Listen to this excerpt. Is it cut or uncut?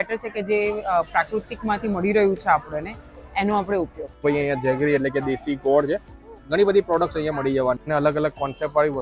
cut